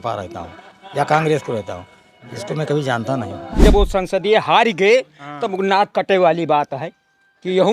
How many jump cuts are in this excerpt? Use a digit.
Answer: 1